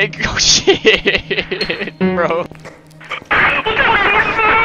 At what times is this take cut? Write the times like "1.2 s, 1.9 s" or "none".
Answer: 2.5 s